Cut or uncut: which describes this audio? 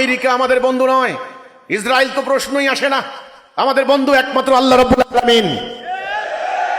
uncut